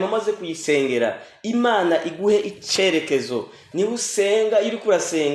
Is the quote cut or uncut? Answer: cut